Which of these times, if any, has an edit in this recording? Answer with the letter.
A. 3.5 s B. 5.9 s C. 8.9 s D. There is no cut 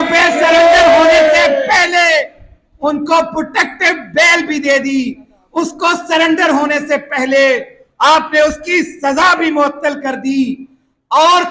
D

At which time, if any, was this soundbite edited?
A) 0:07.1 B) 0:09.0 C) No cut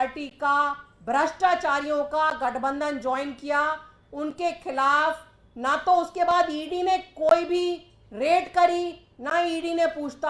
C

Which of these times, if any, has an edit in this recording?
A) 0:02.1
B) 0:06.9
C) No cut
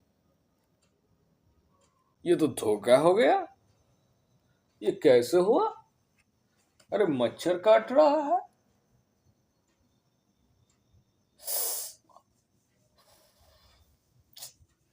A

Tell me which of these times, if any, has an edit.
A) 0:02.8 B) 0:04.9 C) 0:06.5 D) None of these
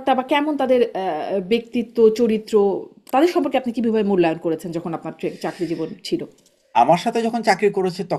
D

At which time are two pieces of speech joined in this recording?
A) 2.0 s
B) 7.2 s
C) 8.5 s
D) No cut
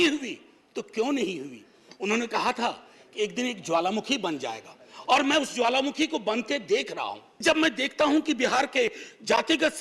B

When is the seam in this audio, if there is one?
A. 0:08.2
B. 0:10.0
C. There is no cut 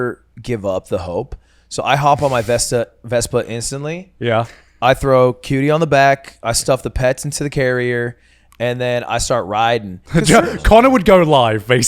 B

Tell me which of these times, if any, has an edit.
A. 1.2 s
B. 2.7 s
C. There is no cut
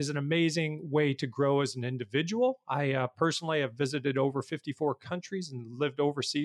C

